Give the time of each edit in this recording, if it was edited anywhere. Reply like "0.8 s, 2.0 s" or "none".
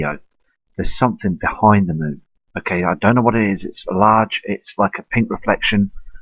4.4 s